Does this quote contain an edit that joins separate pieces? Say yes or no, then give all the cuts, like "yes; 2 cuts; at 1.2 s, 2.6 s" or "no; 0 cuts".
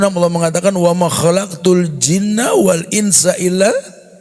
no; 0 cuts